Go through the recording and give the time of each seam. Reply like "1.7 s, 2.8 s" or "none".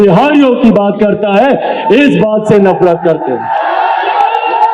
none